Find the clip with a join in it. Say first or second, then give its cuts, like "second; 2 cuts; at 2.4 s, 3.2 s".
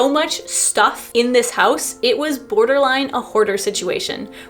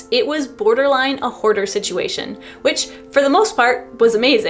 first; 1 cut; at 1.0 s